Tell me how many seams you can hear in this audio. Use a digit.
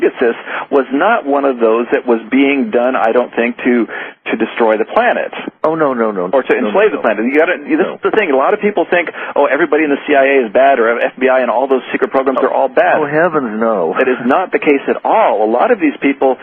1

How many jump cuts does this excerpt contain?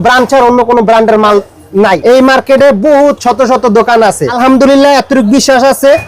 2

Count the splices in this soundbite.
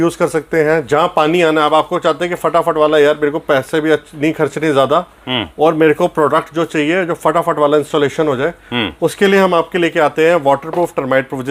0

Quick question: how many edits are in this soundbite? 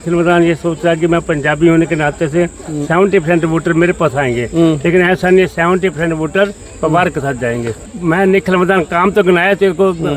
0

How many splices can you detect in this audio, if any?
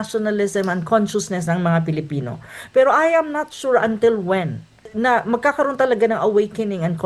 1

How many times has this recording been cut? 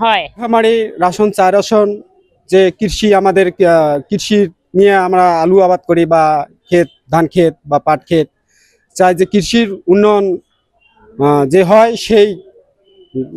0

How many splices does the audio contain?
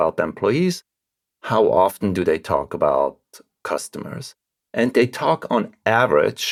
0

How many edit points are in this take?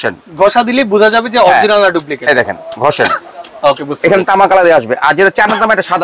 0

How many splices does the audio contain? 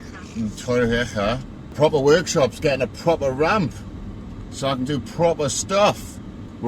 1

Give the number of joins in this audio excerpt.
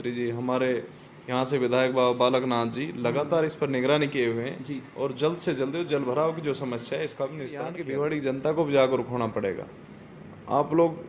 1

